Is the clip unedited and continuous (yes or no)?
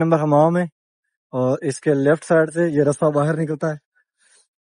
yes